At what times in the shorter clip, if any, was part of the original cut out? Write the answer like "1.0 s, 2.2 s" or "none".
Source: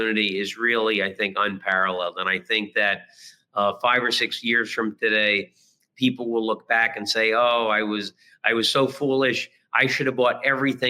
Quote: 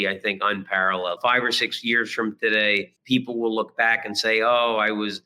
1.2 s, 2.9 s